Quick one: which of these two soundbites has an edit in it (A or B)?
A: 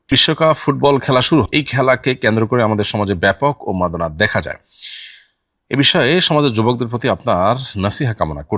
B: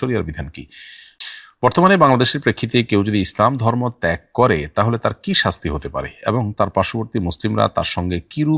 B